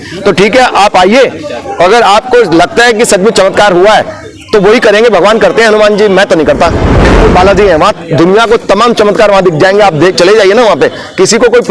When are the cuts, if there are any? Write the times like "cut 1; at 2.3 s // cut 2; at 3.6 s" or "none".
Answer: cut 1; at 7.0 s